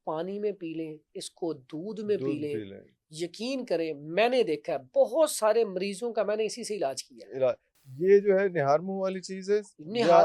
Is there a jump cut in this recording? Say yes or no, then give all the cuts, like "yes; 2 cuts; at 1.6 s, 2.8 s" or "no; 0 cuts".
no; 0 cuts